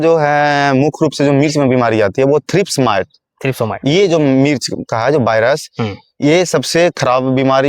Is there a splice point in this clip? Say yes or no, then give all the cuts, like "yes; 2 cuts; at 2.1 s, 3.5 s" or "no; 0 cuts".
no; 0 cuts